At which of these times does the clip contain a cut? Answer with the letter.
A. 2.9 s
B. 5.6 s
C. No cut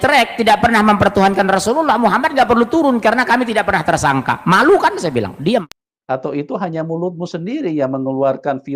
B